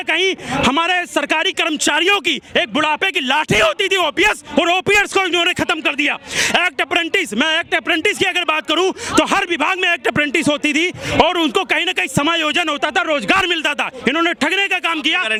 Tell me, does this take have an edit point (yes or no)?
no